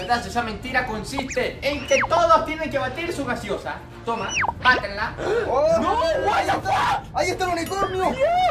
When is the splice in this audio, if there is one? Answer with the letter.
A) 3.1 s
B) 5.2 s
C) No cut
B